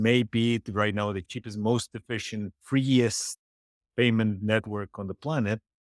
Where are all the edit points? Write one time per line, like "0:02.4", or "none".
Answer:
0:01.2